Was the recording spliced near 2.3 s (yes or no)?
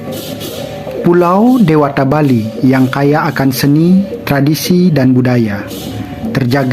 no